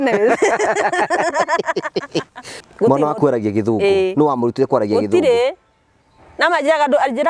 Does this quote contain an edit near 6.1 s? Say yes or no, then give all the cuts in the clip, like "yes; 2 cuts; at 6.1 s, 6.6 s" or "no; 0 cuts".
no; 1 cut; at 2.6 s